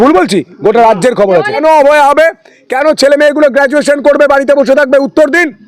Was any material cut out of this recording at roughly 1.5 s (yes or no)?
yes